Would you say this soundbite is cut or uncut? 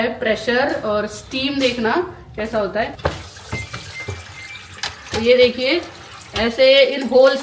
uncut